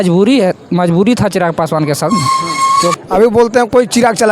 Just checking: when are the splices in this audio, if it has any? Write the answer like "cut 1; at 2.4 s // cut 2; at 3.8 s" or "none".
cut 1; at 2.9 s